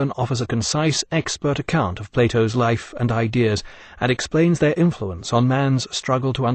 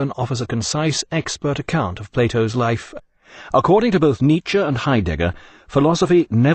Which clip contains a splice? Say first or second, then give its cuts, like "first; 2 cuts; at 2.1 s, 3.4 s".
first; 1 cut; at 3.0 s